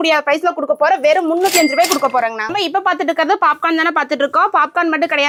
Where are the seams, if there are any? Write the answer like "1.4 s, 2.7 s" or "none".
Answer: none